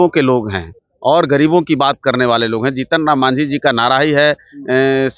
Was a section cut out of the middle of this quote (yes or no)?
no